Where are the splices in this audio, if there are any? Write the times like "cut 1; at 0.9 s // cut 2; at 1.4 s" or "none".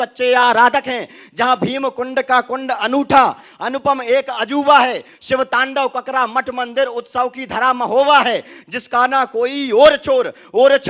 none